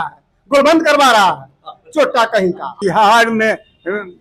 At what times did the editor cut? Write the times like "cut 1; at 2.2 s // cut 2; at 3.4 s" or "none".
cut 1; at 2.7 s

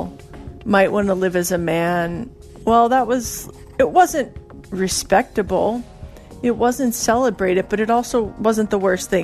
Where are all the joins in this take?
cut 1; at 8.3 s

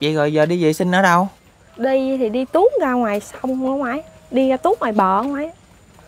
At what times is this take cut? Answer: none

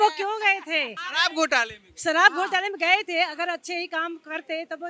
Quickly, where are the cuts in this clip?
cut 1; at 1.0 s

